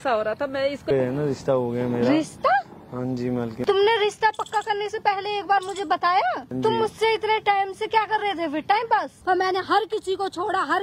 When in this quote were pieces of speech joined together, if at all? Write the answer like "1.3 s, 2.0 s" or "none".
0.9 s, 3.6 s, 6.5 s, 9.1 s